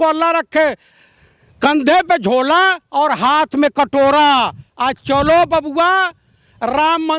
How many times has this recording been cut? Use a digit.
0